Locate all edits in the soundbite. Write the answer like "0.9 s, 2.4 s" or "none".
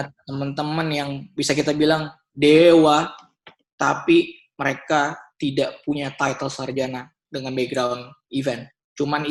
none